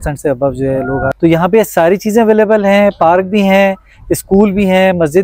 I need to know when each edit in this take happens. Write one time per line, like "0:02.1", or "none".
0:01.1